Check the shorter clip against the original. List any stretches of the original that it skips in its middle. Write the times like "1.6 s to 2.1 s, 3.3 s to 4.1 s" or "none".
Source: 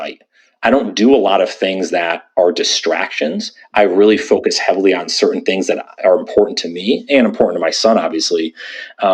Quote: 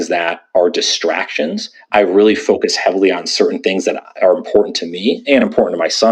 none